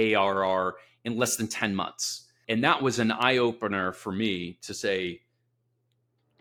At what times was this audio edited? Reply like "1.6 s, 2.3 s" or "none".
none